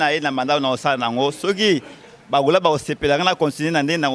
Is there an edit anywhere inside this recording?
no; 0 cuts

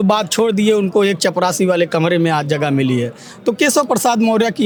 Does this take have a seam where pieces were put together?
no; 0 cuts

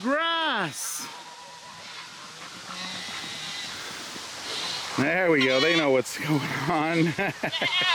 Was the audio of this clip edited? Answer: no; 0 cuts

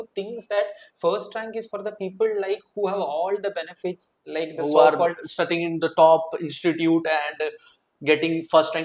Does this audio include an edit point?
no; 0 cuts

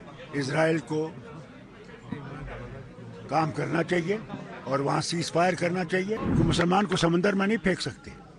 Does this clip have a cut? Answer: yes; 1 cut; at 6.2 s

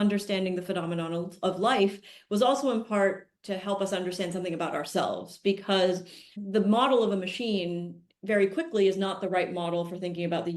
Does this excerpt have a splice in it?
yes; 1 cut; at 6.3 s

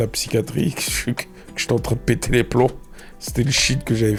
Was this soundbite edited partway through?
no; 0 cuts

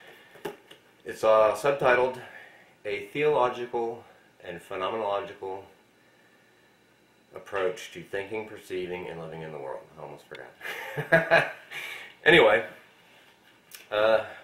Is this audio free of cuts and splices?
no; 1 cut; at 6.3 s

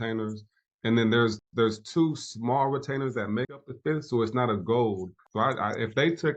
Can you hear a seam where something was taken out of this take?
no; 0 cuts

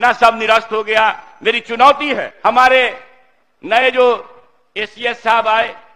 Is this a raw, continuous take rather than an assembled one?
no; 1 cut; at 2.3 s

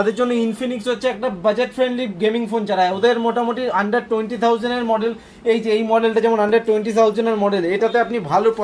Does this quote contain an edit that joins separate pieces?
no; 0 cuts

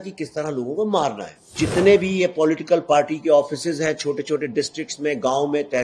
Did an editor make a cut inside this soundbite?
yes; 1 cut; at 1.6 s

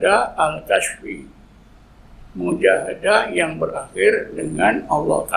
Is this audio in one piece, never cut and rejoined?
yes; 0 cuts

